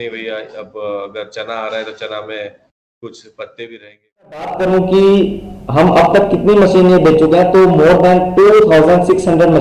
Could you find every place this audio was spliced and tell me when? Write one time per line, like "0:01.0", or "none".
0:04.6